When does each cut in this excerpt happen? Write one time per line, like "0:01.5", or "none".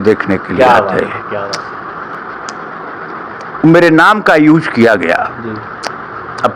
none